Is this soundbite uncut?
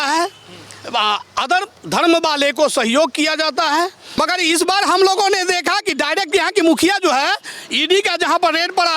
no; 1 cut; at 4.2 s

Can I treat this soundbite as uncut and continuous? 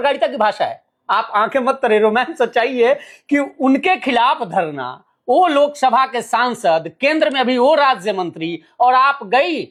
yes; 0 cuts

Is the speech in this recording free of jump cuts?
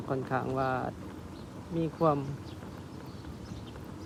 yes; 0 cuts

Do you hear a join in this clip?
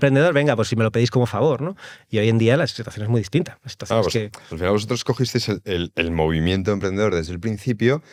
no; 0 cuts

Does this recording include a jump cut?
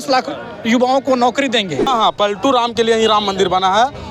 yes; 1 cut; at 1.9 s

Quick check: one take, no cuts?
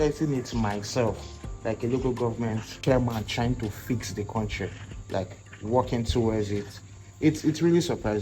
yes; 0 cuts

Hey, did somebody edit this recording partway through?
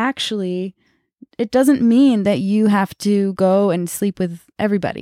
no; 0 cuts

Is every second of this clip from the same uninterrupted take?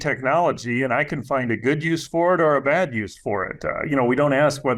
yes; 0 cuts

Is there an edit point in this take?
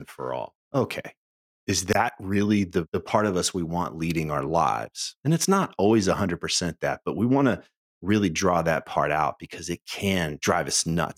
no; 0 cuts

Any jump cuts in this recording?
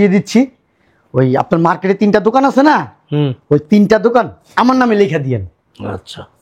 no; 0 cuts

